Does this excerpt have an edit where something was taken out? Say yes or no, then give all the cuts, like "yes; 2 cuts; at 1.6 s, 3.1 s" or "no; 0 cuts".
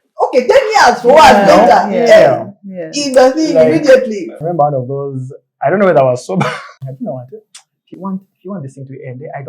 yes; 1 cut; at 4.4 s